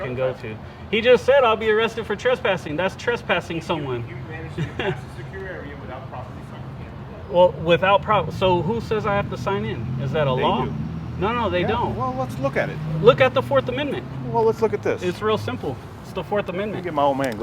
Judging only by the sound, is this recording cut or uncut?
uncut